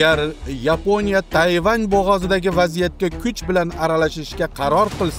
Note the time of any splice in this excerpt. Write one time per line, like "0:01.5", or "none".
0:01.3